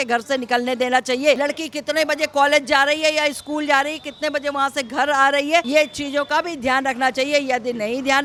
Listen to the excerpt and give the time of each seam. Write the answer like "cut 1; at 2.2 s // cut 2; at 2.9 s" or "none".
none